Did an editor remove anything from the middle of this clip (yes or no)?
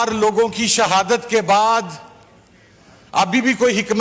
no